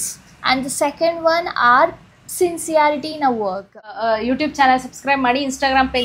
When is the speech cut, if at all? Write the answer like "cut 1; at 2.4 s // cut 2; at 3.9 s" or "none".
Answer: cut 1; at 3.9 s